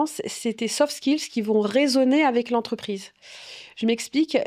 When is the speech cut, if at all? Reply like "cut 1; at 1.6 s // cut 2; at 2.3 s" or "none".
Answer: none